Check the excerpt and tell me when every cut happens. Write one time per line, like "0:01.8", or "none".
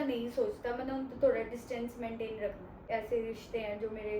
0:02.9